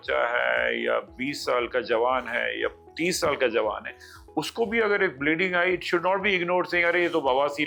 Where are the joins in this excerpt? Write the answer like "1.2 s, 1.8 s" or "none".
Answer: none